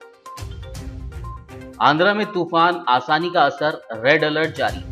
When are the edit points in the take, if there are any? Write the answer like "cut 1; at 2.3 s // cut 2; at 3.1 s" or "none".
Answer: cut 1; at 1.0 s